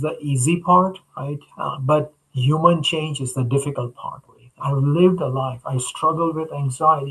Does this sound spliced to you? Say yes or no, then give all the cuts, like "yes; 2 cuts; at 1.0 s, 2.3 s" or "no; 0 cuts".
yes; 1 cut; at 4.5 s